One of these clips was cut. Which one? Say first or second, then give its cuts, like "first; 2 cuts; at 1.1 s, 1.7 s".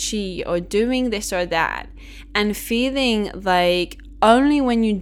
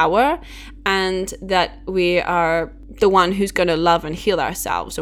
second; 1 cut; at 2.8 s